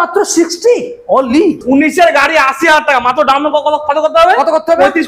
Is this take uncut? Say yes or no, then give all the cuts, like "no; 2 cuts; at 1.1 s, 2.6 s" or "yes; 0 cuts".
no; 1 cut; at 1.6 s